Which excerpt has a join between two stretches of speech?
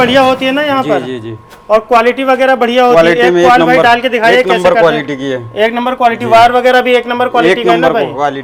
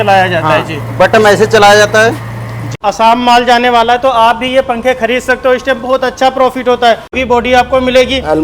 second; 2 cuts; at 2.7 s, 7.2 s

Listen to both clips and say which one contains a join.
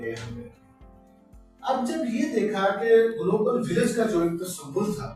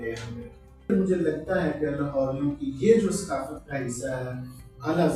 second; 1 cut; at 0.9 s

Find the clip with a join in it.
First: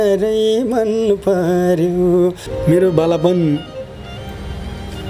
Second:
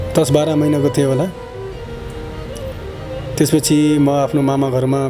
first; 1 cut; at 2.5 s

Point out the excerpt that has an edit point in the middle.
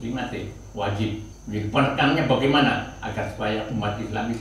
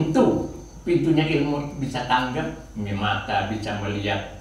first; 1 cut; at 1.3 s

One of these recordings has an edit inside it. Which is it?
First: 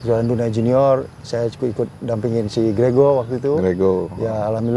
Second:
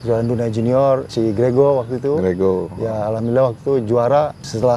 second; 1 cut; at 1.1 s

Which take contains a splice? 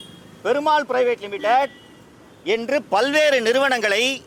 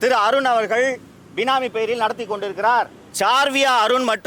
second; 1 cut; at 3.0 s

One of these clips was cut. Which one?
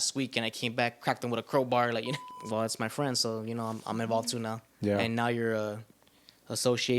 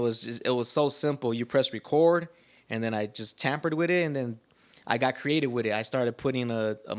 first; 1 cut; at 2.2 s

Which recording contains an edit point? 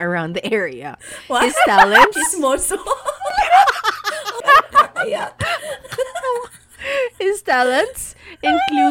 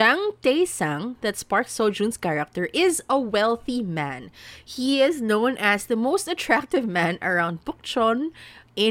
first; 1 cut; at 4.3 s

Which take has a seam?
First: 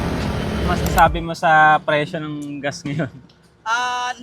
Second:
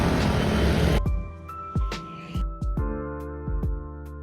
first; 1 cut; at 0.9 s

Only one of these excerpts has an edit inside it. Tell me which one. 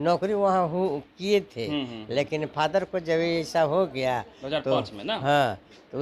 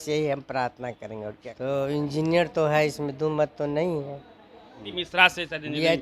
second; 2 cuts; at 0.9 s, 4.9 s

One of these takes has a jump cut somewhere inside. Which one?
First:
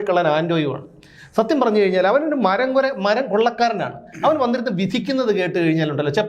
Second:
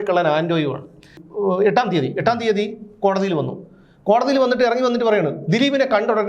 second; 1 cut; at 1.2 s

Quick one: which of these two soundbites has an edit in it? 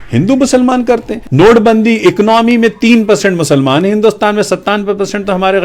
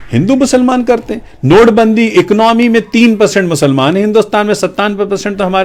first; 1 cut; at 1.2 s

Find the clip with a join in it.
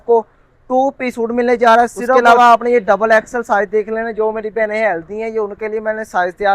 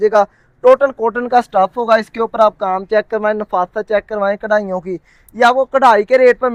first; 1 cut; at 2.1 s

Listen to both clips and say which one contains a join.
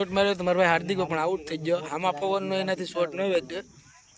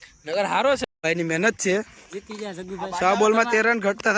second; 1 cut; at 1.0 s

